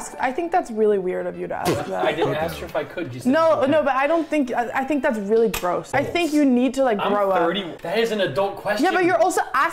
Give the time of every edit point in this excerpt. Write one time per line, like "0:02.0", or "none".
0:05.9
0:07.7

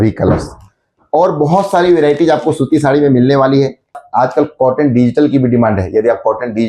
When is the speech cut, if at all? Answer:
0:04.0

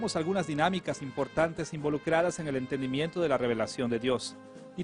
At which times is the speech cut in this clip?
none

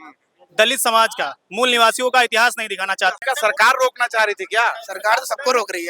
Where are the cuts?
0:03.2

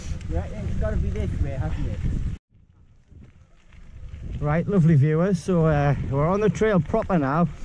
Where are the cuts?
0:02.4

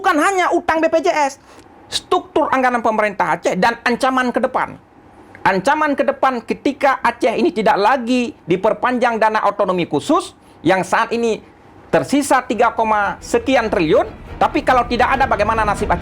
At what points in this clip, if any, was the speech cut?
0:01.5

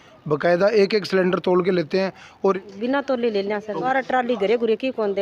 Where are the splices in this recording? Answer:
0:02.5
0:03.8

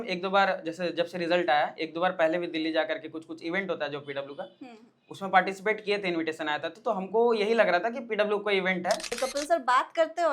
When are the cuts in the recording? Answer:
0:09.2

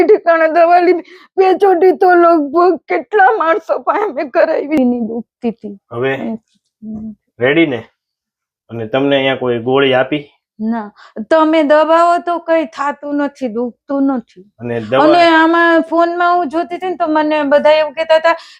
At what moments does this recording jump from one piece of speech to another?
0:04.8

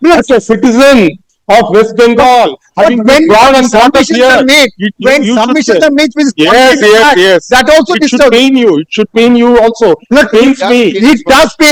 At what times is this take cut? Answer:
none

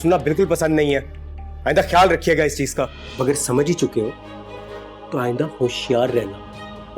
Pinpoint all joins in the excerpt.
0:03.0

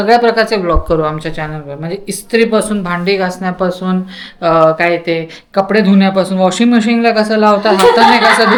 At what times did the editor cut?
none

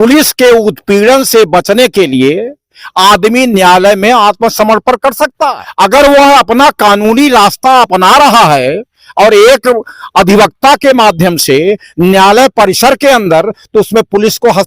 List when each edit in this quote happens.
0:05.6

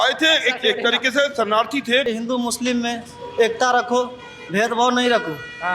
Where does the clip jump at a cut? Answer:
0:02.0

